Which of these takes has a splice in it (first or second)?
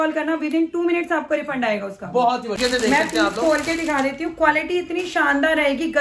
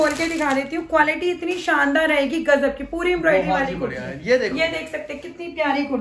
first